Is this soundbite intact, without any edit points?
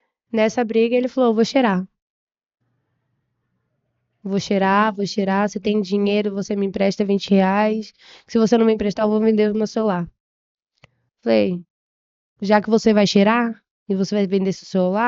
yes; 0 cuts

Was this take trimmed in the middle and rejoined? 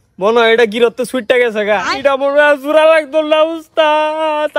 no; 0 cuts

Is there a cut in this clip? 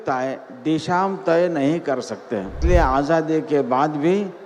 yes; 1 cut; at 2.6 s

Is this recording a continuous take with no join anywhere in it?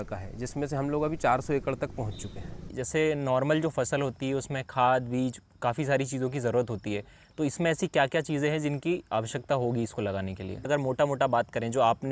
no; 2 cuts; at 2.7 s, 10.6 s

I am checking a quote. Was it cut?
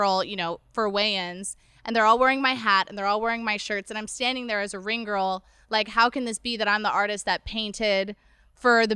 no; 0 cuts

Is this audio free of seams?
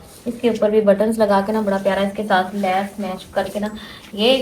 yes; 0 cuts

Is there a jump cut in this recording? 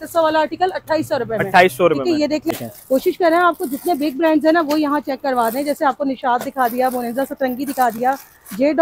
yes; 1 cut; at 2.5 s

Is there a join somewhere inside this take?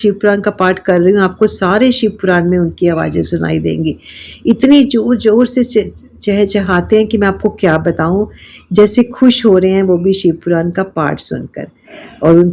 no; 0 cuts

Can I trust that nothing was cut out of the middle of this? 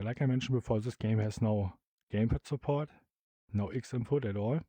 yes; 0 cuts

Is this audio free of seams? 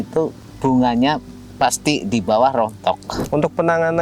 no; 1 cut; at 3.1 s

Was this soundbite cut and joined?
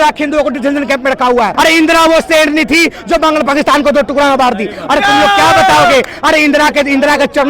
yes; 1 cut; at 1.5 s

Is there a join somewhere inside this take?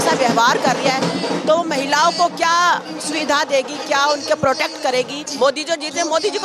yes; 1 cut; at 5.2 s

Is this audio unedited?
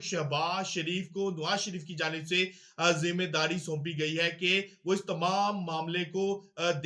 yes; 0 cuts

